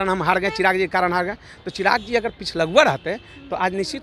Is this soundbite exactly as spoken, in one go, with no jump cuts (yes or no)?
yes